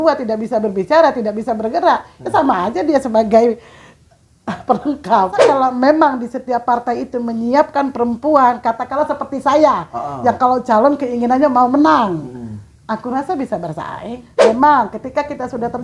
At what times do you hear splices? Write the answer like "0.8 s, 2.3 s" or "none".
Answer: 5.4 s, 14.3 s